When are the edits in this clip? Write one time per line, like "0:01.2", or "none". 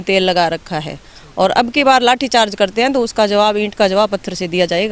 none